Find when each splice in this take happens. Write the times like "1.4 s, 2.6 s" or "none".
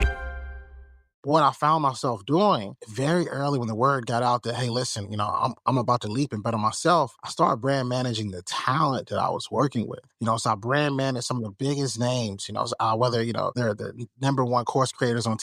1.2 s